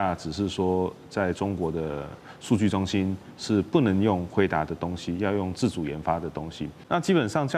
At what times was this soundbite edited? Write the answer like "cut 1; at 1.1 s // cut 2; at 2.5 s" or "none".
cut 1; at 6.7 s